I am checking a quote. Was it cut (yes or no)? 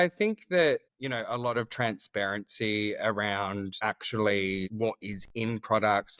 yes